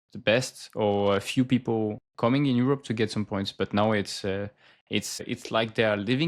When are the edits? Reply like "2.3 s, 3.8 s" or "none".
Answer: 2.0 s, 5.2 s